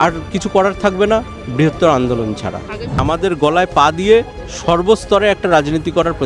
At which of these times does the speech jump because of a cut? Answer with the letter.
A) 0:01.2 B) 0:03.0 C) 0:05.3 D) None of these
B